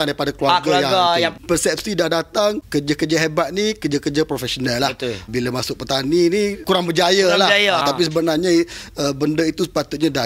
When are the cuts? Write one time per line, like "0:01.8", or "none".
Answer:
0:01.4
0:02.6
0:05.3
0:06.6
0:07.8